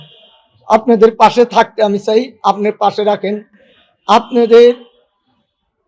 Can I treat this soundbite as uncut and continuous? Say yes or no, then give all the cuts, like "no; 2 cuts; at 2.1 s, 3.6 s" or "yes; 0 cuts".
yes; 0 cuts